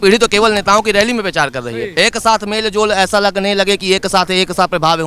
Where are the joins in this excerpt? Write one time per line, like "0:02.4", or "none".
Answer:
0:01.9